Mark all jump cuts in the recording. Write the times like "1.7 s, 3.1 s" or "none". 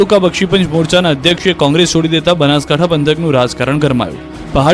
3.5 s

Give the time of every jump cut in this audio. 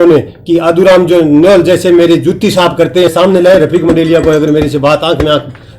3.1 s

